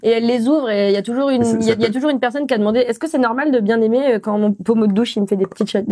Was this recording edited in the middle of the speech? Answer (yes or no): no